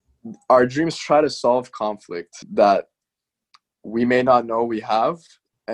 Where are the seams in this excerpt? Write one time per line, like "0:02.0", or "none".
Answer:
0:02.4